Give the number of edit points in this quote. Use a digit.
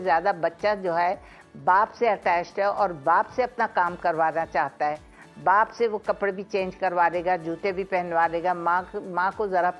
0